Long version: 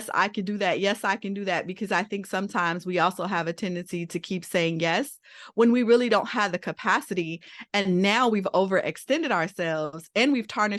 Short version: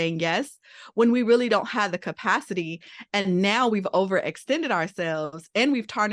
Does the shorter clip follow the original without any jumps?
yes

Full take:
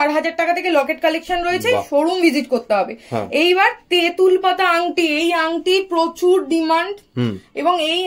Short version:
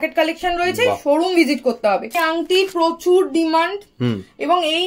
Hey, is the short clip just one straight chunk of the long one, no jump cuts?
no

